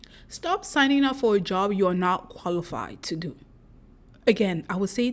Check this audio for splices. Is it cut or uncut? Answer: uncut